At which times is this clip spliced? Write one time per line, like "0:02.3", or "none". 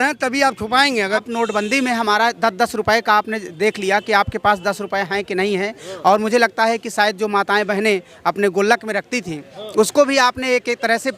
0:01.2